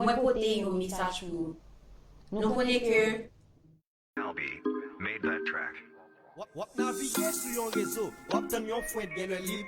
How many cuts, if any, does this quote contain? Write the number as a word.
one